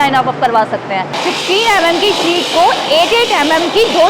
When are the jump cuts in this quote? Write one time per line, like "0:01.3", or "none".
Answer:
0:01.1